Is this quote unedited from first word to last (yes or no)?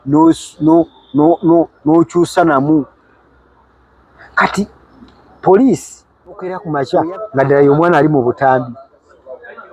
no